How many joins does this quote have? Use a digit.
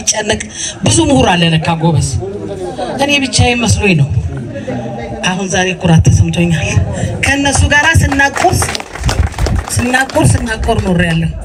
0